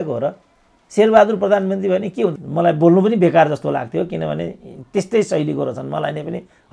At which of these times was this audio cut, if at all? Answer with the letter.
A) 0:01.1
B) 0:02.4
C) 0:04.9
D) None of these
B